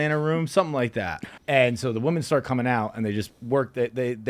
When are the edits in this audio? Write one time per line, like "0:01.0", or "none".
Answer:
0:01.2